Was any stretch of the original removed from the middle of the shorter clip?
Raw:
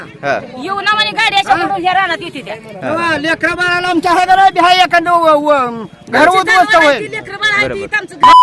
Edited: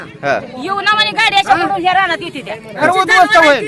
yes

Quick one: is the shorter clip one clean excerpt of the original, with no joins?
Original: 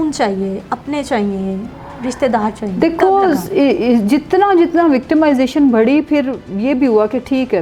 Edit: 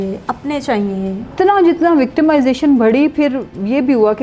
no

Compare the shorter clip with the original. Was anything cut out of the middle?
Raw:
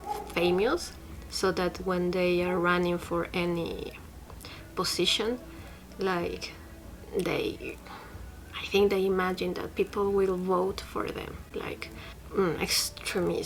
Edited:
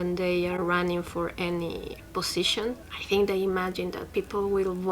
yes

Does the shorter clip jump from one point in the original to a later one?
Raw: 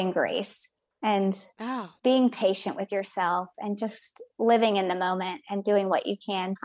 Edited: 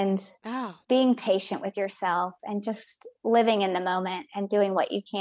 no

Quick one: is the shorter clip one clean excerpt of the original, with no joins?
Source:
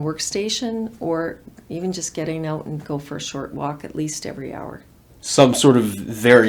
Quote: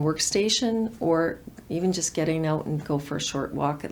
yes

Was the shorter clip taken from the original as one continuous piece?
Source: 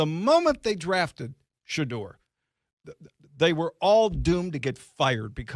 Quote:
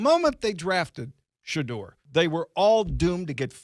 no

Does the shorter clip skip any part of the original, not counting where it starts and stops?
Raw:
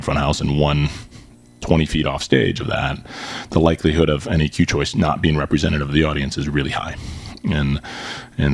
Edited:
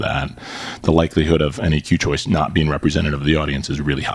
no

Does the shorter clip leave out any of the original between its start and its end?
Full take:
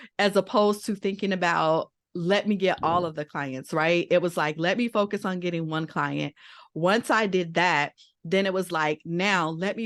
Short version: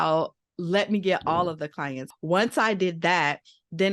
yes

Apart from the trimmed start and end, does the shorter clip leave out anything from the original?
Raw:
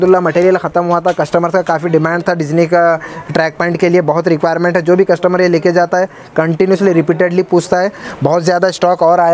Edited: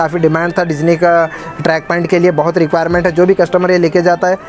no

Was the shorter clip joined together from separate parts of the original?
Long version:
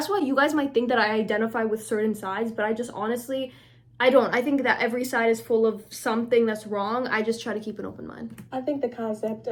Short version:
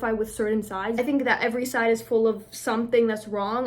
yes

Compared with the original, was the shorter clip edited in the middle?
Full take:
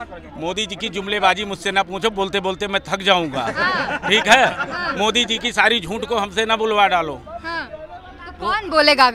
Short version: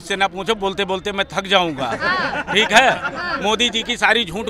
no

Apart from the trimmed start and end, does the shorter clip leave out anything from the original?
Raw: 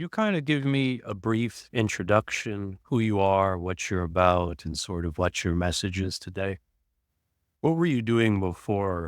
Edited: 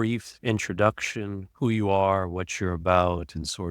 no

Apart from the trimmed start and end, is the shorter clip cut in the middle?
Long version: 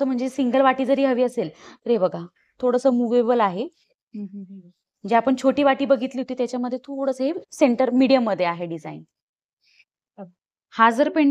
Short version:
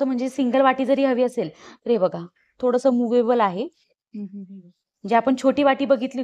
no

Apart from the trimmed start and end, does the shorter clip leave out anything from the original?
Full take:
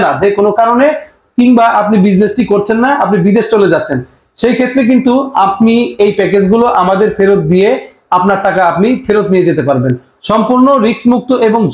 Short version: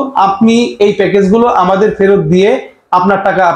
no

